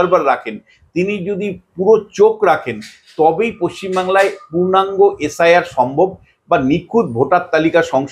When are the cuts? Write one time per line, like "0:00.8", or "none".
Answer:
none